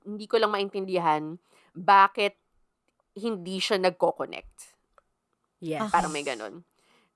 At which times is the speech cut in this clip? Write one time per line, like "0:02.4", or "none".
none